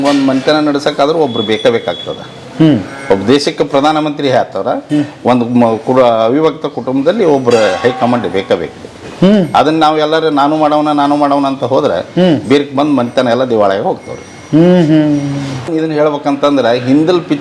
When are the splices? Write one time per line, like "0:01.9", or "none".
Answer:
0:15.7